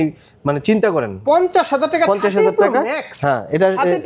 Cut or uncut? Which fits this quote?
cut